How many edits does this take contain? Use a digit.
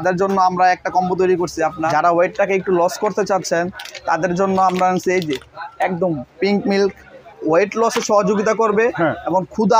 2